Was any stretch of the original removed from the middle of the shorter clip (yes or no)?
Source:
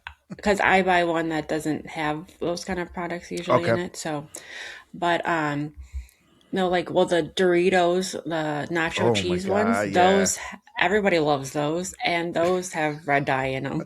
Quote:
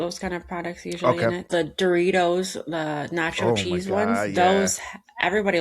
yes